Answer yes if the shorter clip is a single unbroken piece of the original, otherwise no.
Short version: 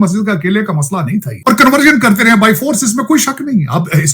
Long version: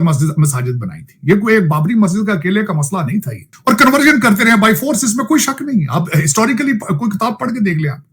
no